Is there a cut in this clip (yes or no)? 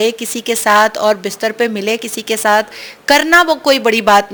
no